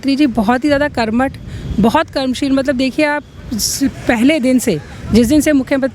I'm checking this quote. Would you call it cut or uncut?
uncut